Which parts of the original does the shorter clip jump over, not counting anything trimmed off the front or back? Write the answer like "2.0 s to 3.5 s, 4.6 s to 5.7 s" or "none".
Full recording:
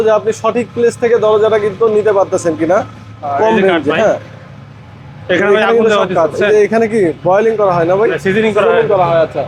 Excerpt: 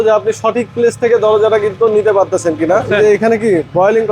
2.9 s to 6.4 s